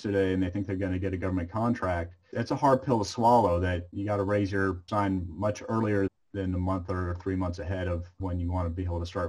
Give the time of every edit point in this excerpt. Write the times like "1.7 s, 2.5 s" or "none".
2.3 s, 3.9 s, 4.8 s, 6.1 s, 8.1 s